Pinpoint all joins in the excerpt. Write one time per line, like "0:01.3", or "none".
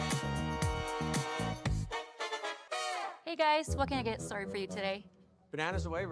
0:03.1